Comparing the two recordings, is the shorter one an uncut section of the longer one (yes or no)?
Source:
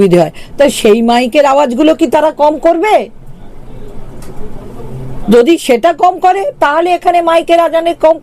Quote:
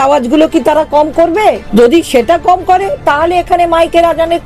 no